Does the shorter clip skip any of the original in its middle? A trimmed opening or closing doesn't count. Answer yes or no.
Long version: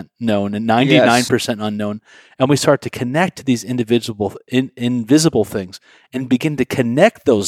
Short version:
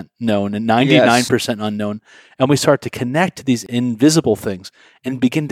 yes